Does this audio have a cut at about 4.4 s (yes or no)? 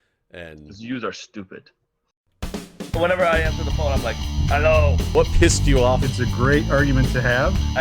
no